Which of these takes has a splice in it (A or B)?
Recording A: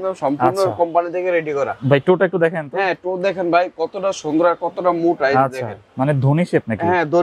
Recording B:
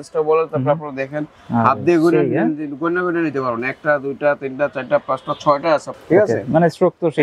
B